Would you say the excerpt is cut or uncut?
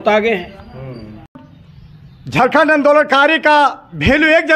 cut